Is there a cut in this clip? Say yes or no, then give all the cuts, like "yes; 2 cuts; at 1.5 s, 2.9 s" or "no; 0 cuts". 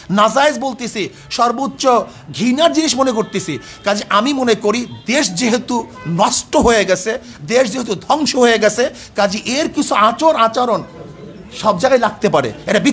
no; 0 cuts